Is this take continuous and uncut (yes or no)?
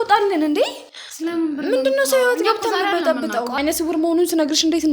no